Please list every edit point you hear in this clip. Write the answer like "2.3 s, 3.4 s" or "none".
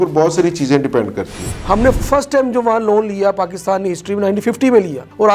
1.5 s